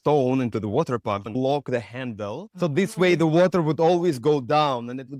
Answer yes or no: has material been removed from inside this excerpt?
yes